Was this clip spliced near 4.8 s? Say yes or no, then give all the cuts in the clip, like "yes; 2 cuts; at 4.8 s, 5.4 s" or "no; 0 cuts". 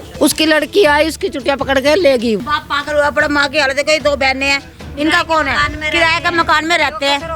no; 1 cut; at 2.4 s